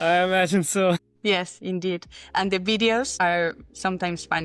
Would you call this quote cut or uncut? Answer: cut